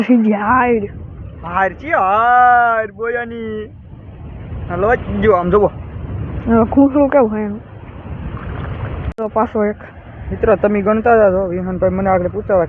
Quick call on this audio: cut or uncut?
uncut